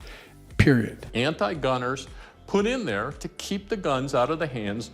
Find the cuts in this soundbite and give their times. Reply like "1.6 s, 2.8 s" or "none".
1.0 s